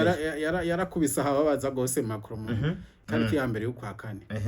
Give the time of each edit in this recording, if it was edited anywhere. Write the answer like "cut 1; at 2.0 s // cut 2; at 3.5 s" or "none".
cut 1; at 2.9 s